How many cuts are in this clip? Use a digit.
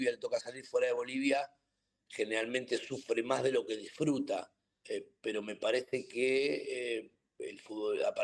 0